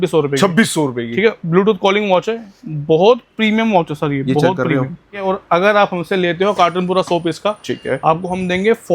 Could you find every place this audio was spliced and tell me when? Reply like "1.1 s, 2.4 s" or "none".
5.2 s

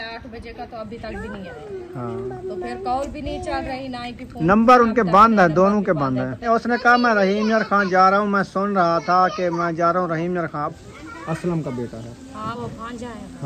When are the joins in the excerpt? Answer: 1.9 s, 6.5 s, 10.8 s

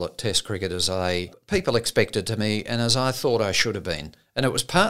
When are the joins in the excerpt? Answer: 1.4 s

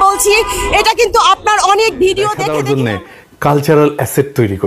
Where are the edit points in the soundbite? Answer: 2.5 s

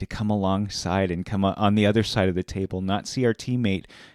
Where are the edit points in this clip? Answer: none

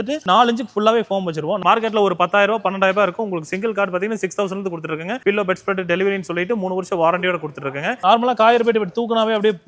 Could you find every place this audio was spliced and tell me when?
1.6 s, 8.0 s

